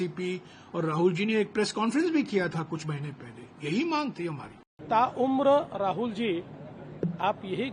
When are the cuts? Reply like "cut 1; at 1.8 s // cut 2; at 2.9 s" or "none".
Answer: cut 1; at 4.8 s